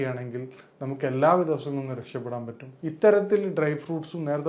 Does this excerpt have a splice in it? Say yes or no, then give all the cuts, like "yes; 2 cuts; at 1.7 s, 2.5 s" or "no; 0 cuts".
yes; 1 cut; at 2.6 s